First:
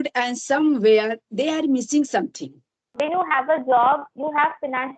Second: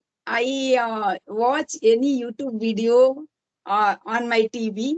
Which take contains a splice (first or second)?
first